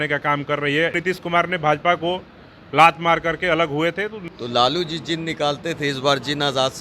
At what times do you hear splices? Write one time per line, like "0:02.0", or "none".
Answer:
0:01.0
0:04.2